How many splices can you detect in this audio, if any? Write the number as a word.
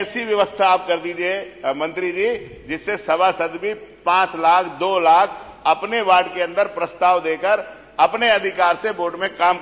zero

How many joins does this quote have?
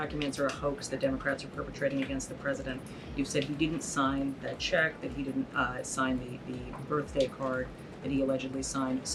zero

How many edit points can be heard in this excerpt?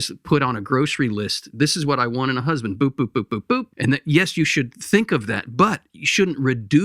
one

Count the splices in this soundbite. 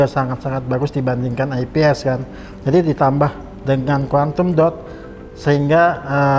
zero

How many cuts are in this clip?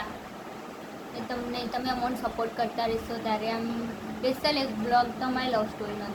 zero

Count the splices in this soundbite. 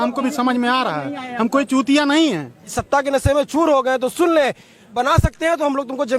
two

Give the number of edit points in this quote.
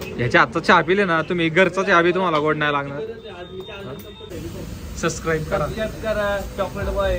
one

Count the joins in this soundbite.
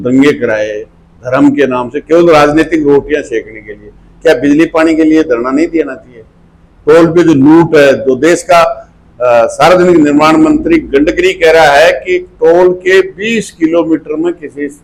zero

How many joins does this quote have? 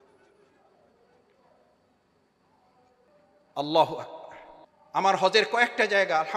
one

